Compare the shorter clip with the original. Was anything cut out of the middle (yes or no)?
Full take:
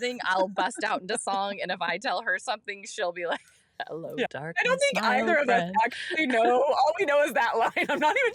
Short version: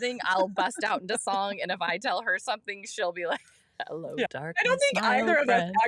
no